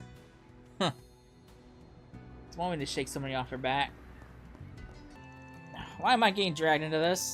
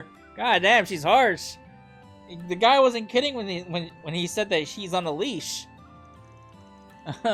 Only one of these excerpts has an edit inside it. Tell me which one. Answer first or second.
first